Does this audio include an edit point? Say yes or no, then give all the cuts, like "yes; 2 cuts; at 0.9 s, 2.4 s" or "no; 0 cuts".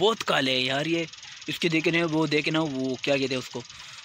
no; 0 cuts